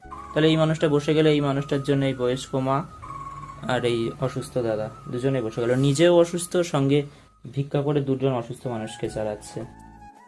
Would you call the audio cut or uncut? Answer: uncut